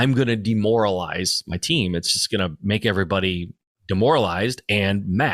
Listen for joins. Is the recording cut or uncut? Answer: uncut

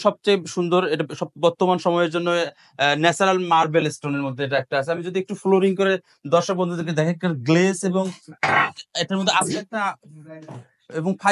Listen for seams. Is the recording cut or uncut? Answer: uncut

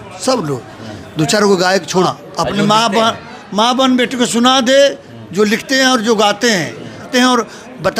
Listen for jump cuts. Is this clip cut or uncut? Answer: cut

